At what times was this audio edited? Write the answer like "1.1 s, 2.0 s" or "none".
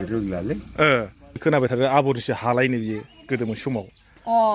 1.4 s